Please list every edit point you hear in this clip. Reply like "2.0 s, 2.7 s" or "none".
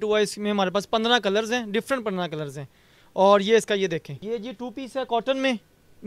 4.1 s